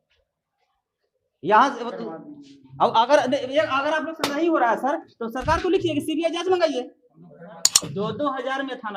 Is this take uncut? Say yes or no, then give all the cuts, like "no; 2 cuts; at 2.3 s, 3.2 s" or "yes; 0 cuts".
no; 1 cut; at 7.7 s